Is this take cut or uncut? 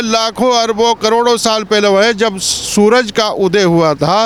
uncut